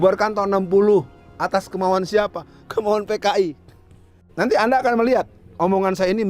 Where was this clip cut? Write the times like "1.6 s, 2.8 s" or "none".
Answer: 4.2 s